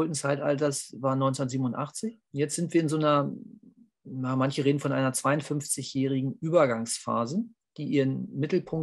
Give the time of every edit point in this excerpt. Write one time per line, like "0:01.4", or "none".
0:02.2